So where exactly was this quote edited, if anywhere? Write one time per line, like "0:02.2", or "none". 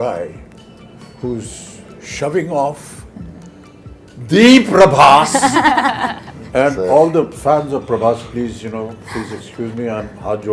none